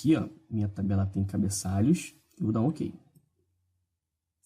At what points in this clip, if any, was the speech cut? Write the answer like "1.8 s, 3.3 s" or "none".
none